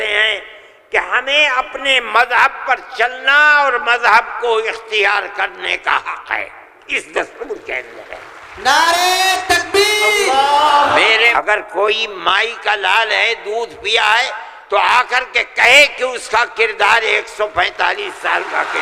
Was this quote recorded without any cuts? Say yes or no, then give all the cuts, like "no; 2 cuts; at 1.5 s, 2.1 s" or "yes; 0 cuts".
no; 1 cut; at 11.3 s